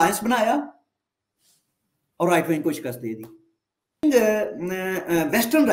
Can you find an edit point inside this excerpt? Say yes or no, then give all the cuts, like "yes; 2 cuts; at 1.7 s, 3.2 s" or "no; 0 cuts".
yes; 1 cut; at 4.0 s